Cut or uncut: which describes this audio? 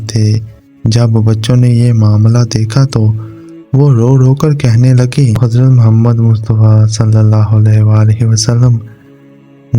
cut